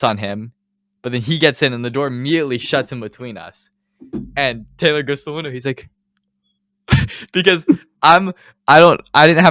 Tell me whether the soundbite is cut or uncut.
uncut